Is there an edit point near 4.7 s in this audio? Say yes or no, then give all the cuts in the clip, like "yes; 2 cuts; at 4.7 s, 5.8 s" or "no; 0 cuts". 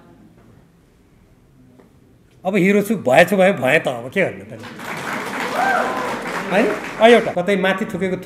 no; 1 cut; at 7.3 s